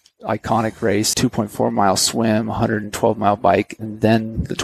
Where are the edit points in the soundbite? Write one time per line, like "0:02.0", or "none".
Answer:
0:01.1